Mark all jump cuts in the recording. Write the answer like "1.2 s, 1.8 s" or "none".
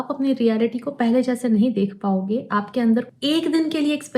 3.1 s